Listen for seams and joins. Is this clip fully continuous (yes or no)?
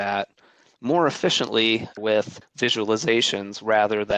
no